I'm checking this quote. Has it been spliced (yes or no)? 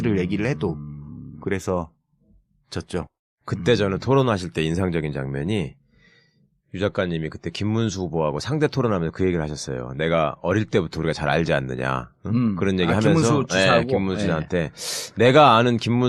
yes